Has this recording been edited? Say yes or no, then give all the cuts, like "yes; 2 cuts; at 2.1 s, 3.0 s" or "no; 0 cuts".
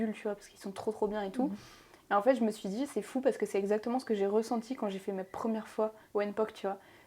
yes; 1 cut; at 6.0 s